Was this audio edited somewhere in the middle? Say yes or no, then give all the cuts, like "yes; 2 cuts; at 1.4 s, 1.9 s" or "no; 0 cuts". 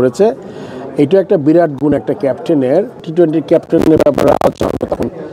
yes; 1 cut; at 3.0 s